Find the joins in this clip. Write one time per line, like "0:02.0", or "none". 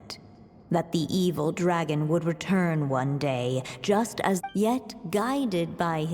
0:04.4

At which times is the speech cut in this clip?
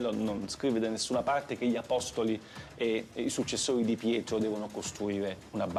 none

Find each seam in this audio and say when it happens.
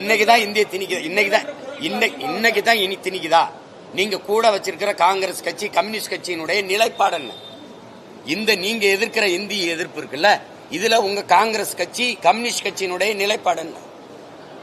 none

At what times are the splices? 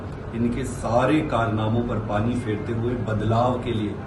none

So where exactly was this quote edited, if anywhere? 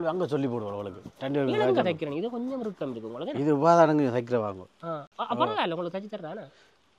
none

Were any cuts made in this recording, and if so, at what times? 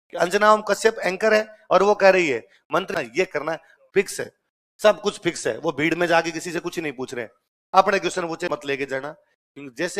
0:02.9
0:08.6

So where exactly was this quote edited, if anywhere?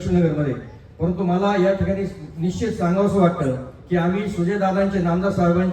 none

